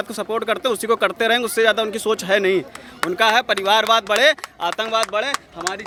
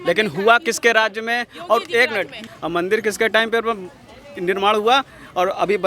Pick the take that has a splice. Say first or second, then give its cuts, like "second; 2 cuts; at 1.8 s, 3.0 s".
second; 1 cut; at 2.5 s